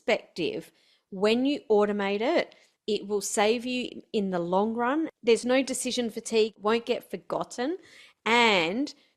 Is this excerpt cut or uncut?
cut